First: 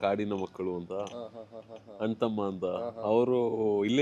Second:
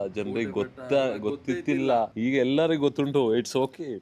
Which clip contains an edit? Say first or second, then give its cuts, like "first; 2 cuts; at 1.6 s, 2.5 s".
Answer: second; 1 cut; at 2.1 s